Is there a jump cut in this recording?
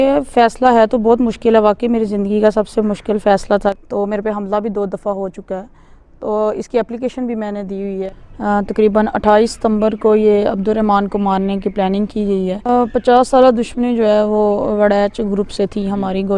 yes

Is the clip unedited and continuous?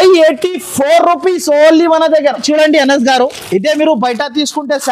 no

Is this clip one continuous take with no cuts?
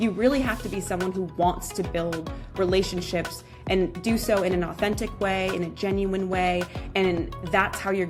yes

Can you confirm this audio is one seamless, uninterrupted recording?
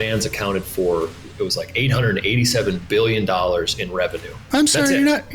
no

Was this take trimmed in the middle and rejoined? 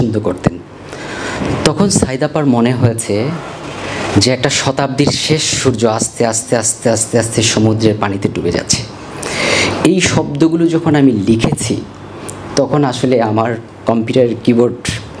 no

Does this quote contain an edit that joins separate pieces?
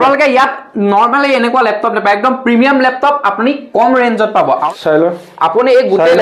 yes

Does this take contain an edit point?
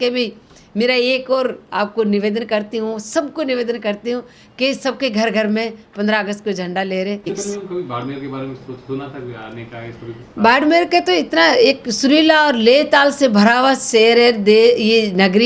yes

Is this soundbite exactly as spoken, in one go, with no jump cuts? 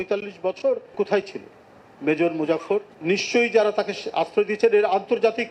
no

